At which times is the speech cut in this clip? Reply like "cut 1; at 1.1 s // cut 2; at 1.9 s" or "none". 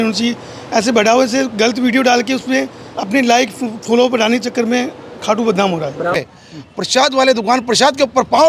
cut 1; at 6.2 s